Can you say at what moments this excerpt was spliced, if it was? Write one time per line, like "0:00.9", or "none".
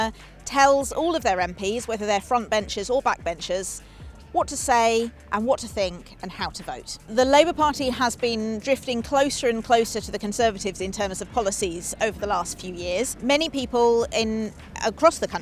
0:07.0
0:13.1